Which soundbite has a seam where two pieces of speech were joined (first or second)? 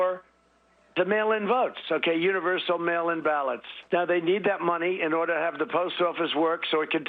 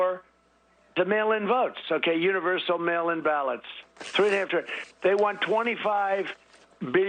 first